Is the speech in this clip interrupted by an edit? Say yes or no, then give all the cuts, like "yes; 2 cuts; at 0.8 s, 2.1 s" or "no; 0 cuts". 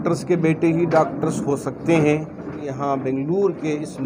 yes; 1 cut; at 2.7 s